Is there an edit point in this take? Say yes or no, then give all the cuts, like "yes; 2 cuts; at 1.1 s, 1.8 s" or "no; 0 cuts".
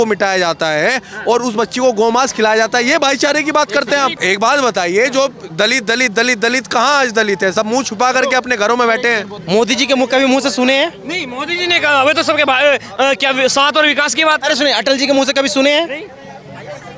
no; 0 cuts